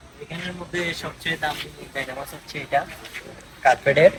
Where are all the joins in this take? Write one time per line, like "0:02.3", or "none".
none